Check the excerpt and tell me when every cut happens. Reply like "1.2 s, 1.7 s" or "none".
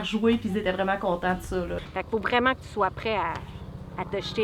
1.8 s